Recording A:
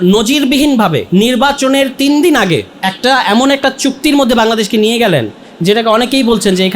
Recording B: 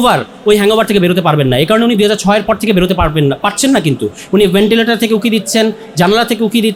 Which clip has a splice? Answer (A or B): A